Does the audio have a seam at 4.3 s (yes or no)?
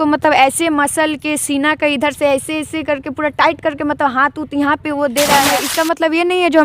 no